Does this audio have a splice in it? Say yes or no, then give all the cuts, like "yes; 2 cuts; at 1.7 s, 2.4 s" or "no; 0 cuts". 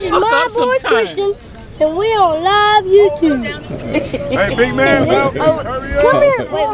no; 0 cuts